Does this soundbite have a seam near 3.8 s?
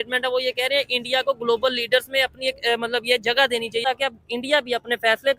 yes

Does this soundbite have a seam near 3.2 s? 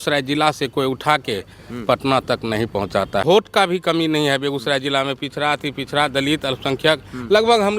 yes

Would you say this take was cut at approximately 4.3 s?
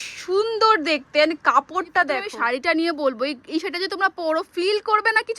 no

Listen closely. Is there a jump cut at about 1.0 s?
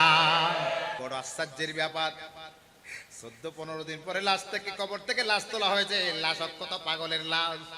yes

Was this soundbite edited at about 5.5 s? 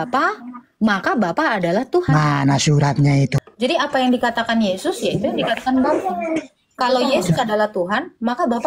no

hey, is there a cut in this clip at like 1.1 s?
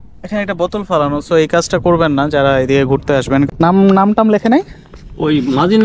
no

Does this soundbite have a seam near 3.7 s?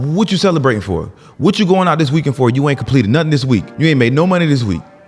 yes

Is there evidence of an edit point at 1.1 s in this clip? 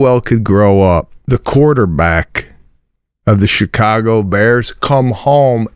yes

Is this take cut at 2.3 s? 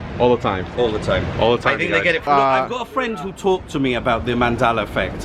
yes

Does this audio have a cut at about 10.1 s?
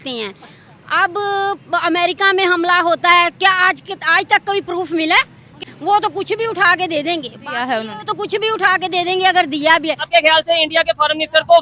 yes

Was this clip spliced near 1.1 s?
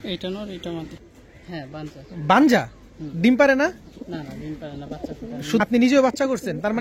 yes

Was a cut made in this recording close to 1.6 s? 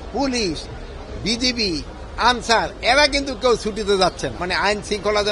no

